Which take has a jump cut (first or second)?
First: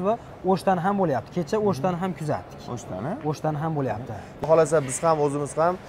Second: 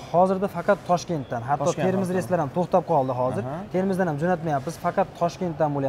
first